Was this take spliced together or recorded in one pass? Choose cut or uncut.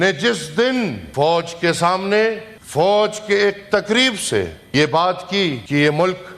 cut